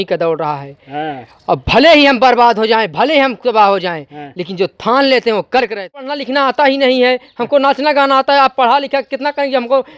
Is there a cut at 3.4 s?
no; 1 cut; at 6.2 s

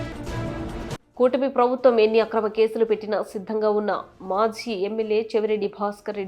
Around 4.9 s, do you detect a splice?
no; 1 cut; at 0.9 s

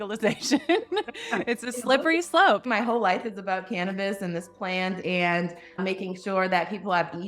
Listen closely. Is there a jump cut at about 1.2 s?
no; 2 cuts; at 2.6 s, 5.8 s

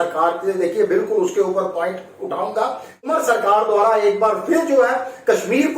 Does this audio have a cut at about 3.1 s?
yes; 1 cut; at 3.1 s

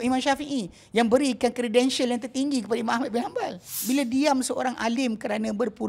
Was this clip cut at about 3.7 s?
yes; 1 cut; at 3.7 s

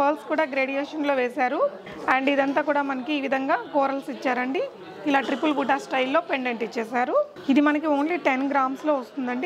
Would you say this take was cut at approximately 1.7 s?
no; 0 cuts

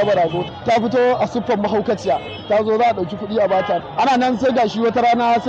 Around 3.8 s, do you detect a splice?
yes; 1 cut; at 3.8 s

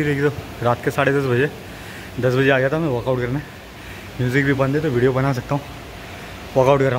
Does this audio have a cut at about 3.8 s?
no; 0 cuts

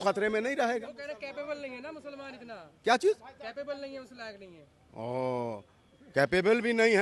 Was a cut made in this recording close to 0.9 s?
no; 0 cuts

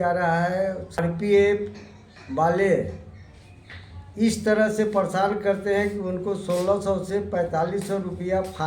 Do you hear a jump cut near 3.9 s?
no; 1 cut; at 1.0 s

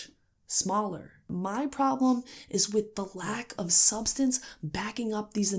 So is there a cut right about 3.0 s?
no; 1 cut; at 1.3 s

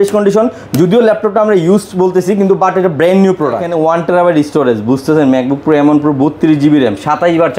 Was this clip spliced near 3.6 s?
yes; 1 cut; at 3.6 s

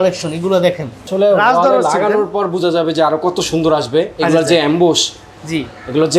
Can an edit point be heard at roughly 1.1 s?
no; 0 cuts

